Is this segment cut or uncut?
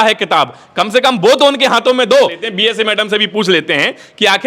cut